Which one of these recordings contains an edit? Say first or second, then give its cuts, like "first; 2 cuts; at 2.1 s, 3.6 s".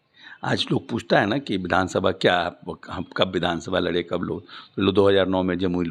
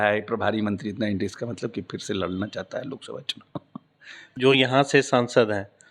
second; 1 cut; at 4.2 s